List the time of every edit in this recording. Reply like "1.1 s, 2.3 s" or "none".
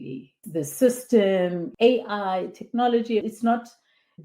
1.7 s, 3.2 s